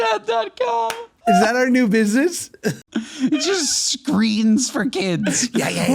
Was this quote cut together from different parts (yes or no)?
yes